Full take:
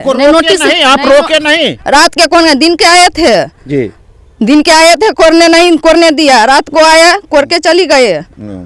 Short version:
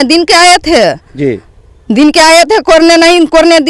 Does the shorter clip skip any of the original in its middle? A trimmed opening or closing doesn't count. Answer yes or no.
no